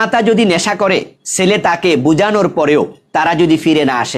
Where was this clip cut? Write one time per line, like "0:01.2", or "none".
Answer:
0:01.2
0:03.0